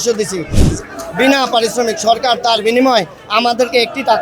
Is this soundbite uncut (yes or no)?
yes